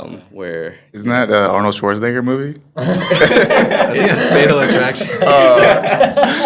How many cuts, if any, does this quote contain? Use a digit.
0